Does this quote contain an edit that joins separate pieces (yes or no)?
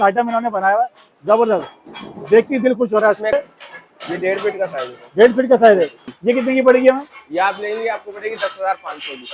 yes